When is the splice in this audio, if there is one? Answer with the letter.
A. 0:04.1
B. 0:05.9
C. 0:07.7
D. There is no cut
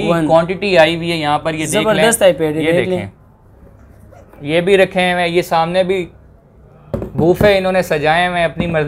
D